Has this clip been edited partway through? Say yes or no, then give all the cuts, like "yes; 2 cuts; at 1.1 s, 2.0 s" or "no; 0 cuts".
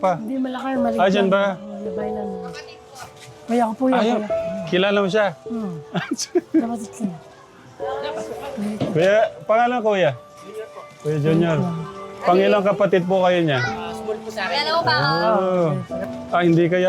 yes; 1 cut; at 15.9 s